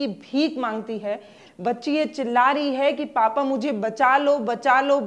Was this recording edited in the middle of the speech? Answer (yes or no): no